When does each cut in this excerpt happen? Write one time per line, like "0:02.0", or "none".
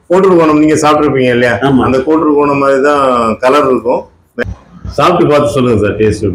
0:04.2